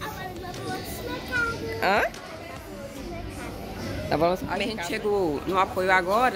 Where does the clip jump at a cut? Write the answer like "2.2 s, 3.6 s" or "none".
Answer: 4.5 s